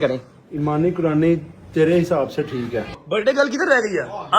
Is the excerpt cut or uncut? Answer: cut